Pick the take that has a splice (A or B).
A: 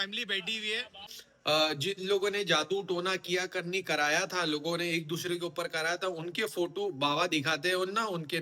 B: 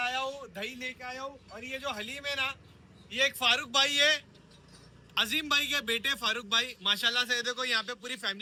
A